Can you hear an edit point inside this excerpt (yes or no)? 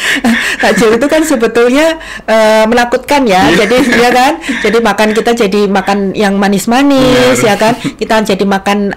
no